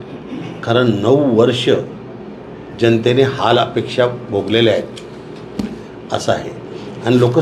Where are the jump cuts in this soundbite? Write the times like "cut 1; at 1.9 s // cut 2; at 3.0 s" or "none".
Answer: cut 1; at 5.6 s